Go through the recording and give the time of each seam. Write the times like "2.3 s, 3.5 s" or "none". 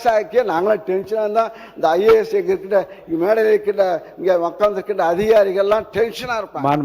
none